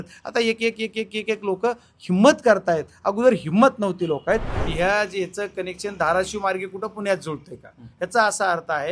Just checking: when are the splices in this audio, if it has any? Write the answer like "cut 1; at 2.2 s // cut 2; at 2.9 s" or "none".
cut 1; at 4.6 s

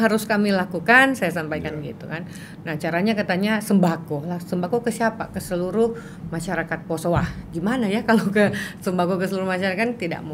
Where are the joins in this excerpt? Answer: none

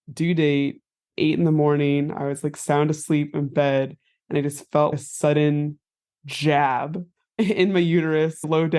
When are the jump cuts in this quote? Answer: cut 1; at 1.0 s

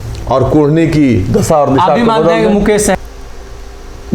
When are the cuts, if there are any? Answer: cut 1; at 3.0 s

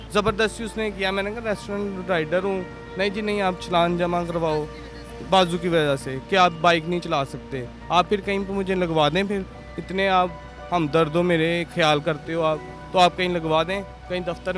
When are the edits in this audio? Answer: none

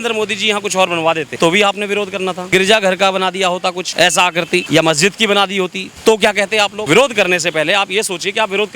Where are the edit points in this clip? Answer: cut 1; at 1.3 s // cut 2; at 2.4 s // cut 3; at 3.8 s // cut 4; at 4.7 s // cut 5; at 5.8 s // cut 6; at 6.8 s

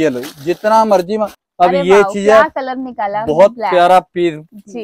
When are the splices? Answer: cut 1; at 1.4 s

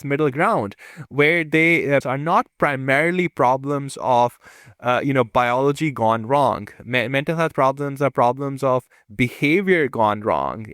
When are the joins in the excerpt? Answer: cut 1; at 2.0 s

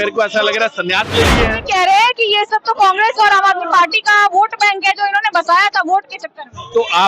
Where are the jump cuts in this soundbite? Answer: cut 1; at 1.6 s

